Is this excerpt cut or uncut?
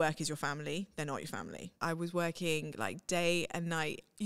cut